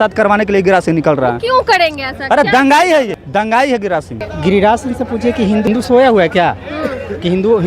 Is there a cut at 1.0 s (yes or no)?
no